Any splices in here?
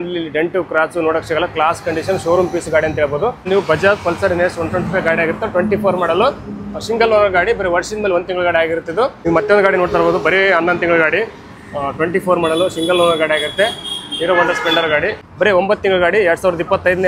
yes; 3 cuts; at 3.5 s, 9.2 s, 15.2 s

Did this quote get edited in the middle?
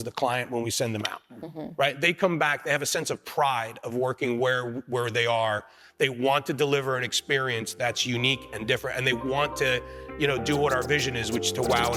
no; 0 cuts

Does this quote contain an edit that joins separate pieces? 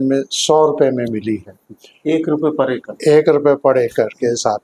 no; 0 cuts

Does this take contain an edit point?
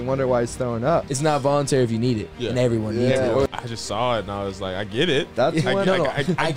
yes; 2 cuts; at 1.1 s, 3.5 s

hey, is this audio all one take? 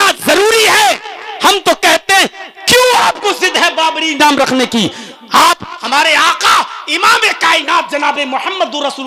yes; 0 cuts

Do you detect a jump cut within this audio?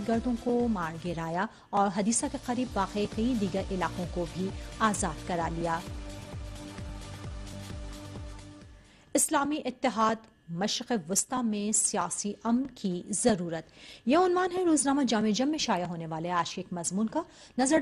yes; 1 cut; at 7.8 s

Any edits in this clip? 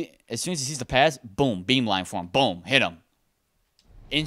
no; 0 cuts

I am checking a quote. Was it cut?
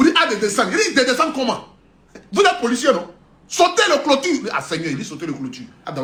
no; 0 cuts

